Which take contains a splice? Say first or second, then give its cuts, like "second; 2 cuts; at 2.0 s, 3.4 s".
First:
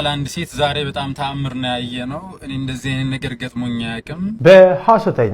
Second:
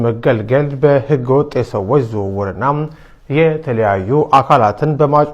first; 1 cut; at 4.4 s